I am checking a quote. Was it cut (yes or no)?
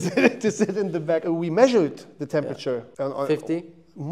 yes